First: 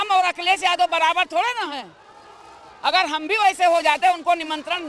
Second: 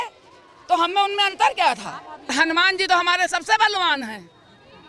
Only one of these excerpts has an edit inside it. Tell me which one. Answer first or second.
second